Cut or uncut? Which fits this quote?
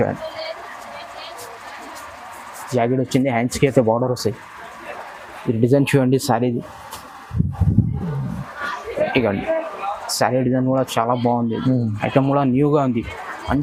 uncut